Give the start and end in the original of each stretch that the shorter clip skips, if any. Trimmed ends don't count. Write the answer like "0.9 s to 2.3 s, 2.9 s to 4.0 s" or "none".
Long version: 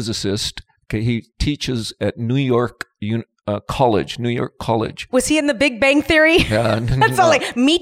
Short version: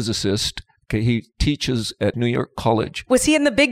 2.2 s to 4.2 s

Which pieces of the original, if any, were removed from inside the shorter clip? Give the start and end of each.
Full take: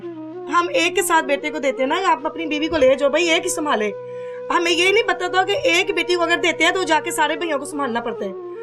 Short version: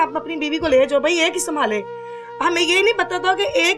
none

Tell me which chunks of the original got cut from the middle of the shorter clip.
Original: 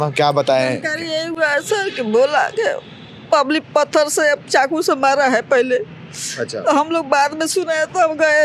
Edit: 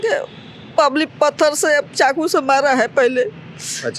none

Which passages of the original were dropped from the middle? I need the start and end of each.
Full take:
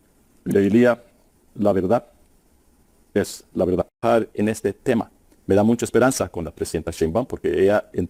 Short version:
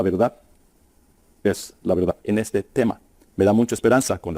3.9 s to 4.3 s

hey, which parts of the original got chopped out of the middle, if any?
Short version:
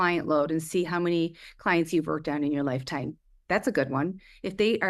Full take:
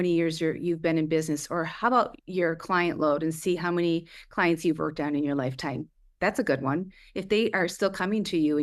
none

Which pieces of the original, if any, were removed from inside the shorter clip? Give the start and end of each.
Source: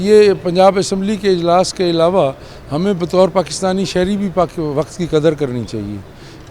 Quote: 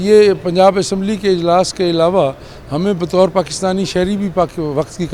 none

